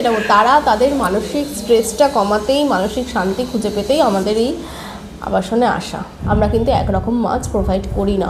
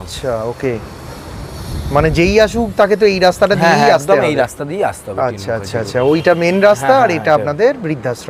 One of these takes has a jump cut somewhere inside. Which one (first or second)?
first